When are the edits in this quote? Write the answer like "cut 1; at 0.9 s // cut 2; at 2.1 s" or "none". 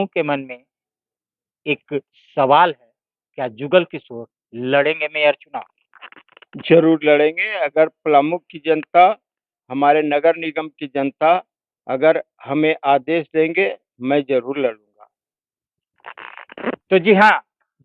none